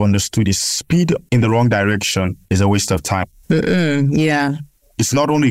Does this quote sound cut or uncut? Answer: uncut